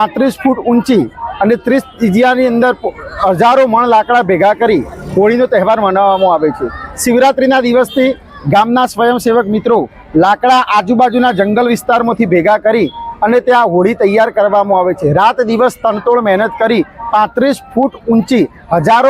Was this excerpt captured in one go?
yes; 0 cuts

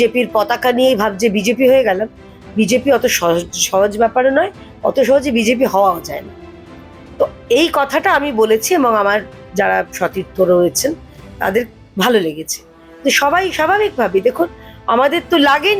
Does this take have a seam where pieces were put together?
no; 0 cuts

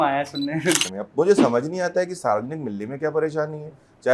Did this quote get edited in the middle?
yes; 1 cut; at 1.0 s

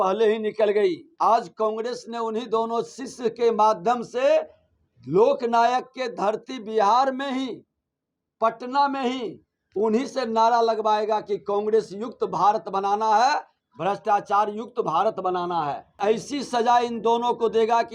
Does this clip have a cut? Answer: yes; 2 cuts; at 1.1 s, 15.9 s

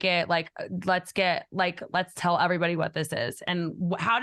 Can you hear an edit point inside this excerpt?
no; 0 cuts

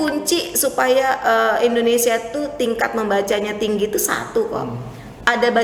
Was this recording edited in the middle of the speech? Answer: no; 0 cuts

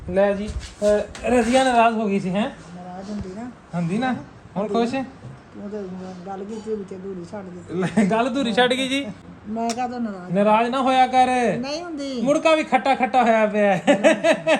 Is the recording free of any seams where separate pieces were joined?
no; 1 cut; at 9.3 s

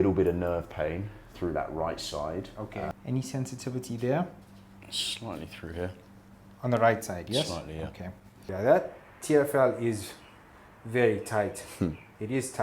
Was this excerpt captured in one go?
no; 2 cuts; at 2.9 s, 8.3 s

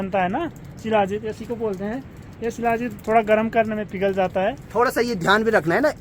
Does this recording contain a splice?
no; 0 cuts

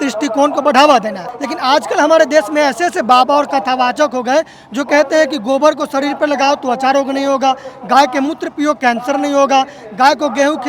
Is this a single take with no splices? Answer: yes; 0 cuts

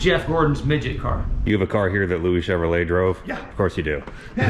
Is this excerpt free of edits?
no; 2 cuts; at 1.3 s, 3.4 s

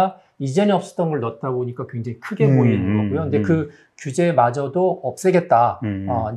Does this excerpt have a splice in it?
no; 0 cuts

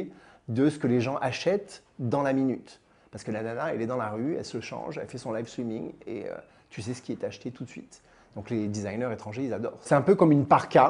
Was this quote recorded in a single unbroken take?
no; 1 cut; at 9.7 s

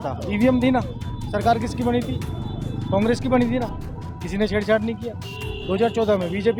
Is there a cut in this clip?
no; 0 cuts

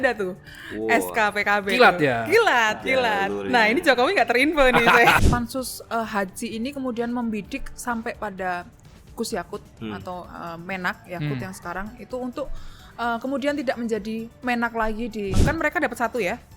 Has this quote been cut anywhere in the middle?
yes; 2 cuts; at 5.2 s, 15.4 s

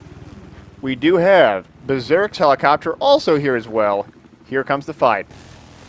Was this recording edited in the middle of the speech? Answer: no; 0 cuts

